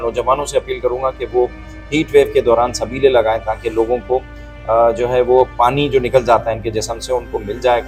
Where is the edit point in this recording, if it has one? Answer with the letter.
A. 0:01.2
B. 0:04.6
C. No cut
C